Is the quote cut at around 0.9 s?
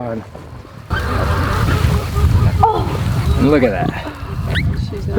yes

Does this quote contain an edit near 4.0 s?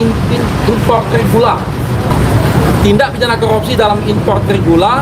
no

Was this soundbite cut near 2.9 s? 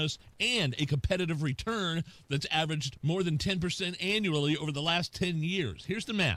no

